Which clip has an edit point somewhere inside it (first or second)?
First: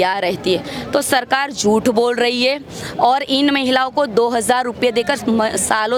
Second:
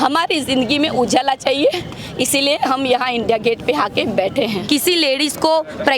second